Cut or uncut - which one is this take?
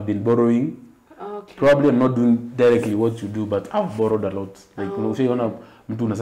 uncut